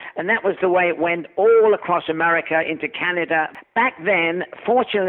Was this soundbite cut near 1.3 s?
no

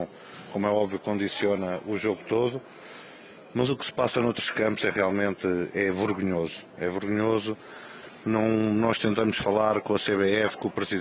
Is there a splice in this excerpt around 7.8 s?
yes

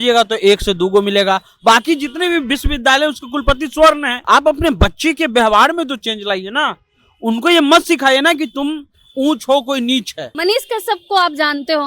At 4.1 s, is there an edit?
yes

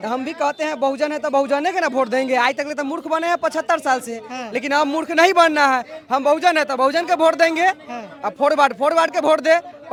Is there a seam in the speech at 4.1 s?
no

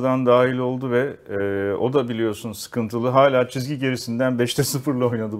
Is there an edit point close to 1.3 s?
no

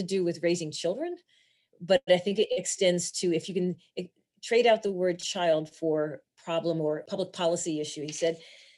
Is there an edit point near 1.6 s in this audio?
no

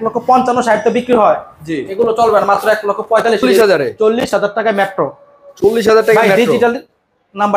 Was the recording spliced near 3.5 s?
yes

